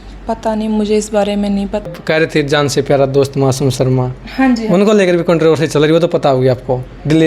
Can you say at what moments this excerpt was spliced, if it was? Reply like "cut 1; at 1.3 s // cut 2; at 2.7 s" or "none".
cut 1; at 1.8 s

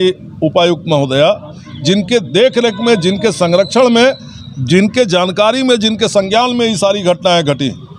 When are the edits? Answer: none

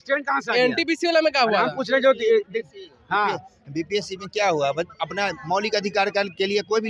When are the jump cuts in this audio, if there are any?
none

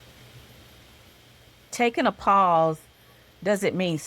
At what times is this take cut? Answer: cut 1; at 1.6 s

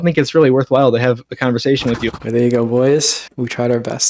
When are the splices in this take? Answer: cut 1; at 2.1 s // cut 2; at 3.2 s

